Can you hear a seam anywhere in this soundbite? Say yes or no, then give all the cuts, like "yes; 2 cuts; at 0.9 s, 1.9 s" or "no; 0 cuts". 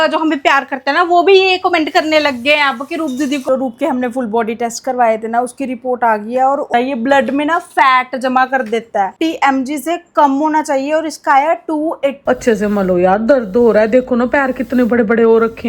yes; 4 cuts; at 3.4 s, 6.7 s, 9.1 s, 12.2 s